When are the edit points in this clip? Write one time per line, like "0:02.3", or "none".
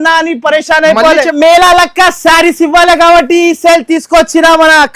0:01.3